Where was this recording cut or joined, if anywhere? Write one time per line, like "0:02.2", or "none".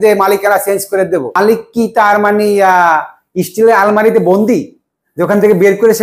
0:01.4